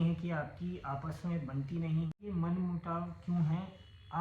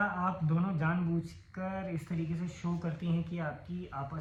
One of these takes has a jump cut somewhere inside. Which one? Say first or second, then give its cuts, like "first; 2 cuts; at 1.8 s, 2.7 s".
first; 1 cut; at 2.1 s